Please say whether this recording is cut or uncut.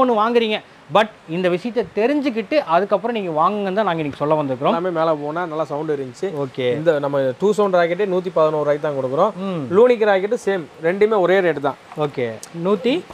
cut